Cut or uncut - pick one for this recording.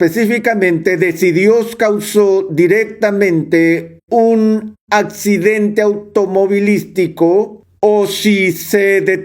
cut